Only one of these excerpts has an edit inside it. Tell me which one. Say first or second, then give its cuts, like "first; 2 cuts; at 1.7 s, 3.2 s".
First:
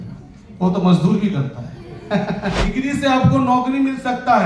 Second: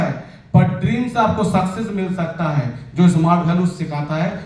first; 1 cut; at 2.7 s